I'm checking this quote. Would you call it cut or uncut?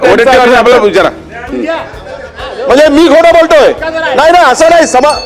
cut